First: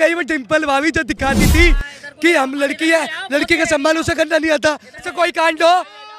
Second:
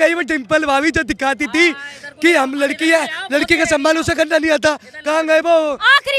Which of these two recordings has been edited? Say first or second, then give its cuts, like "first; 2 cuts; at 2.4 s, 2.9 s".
first; 1 cut; at 5.0 s